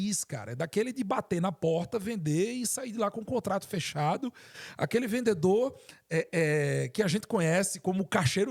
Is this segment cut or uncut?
uncut